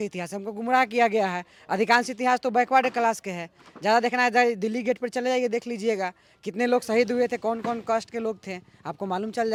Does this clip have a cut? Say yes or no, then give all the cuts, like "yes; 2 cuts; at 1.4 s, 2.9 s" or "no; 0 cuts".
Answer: no; 0 cuts